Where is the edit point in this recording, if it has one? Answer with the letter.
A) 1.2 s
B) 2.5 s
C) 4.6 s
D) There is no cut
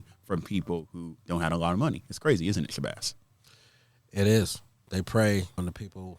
A